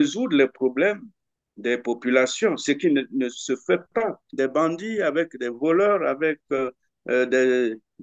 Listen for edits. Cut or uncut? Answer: cut